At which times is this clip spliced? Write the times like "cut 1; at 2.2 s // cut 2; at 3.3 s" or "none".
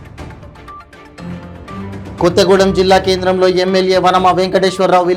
cut 1; at 2.2 s

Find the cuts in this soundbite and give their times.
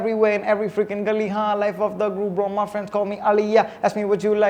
none

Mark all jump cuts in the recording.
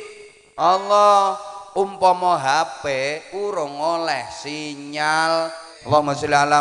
cut 1; at 5.7 s

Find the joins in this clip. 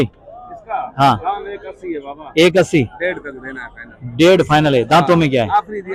none

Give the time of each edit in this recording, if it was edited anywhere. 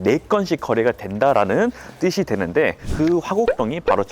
cut 1; at 2.8 s

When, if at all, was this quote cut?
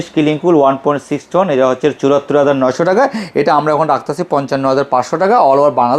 none

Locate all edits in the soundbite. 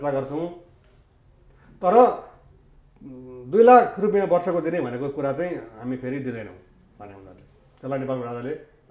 none

